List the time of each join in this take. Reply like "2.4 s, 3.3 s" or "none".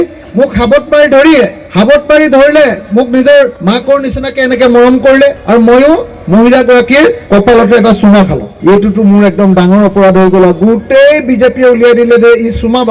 1.6 s, 3.6 s, 5.4 s, 7.2 s, 8.5 s